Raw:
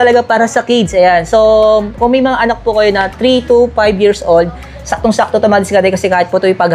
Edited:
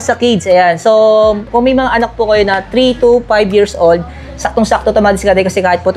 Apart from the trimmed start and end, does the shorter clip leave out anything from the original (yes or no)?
no